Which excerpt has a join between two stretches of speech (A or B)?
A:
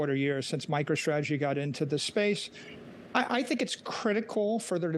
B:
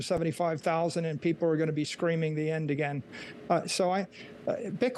A